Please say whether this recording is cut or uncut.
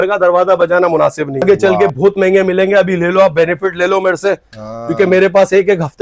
cut